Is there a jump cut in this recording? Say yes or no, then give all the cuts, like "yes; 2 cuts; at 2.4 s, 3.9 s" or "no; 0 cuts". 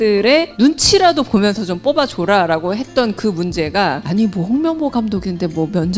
yes; 1 cut; at 4.0 s